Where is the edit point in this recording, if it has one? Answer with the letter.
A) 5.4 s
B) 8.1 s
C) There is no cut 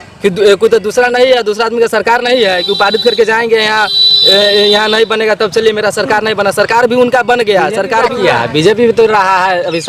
B